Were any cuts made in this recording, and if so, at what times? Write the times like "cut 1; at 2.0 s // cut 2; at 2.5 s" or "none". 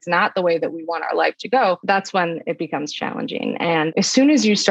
cut 1; at 1.8 s // cut 2; at 3.9 s